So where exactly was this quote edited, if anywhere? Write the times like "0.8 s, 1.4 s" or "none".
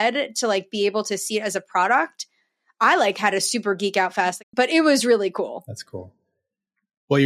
4.4 s